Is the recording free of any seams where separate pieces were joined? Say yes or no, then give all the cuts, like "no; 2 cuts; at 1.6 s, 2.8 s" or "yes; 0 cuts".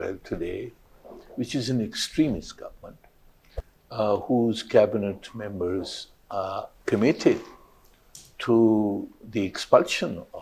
no; 1 cut; at 6.7 s